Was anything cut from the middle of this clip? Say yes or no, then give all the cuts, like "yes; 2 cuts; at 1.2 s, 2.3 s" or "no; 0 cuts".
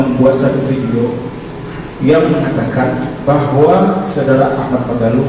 no; 0 cuts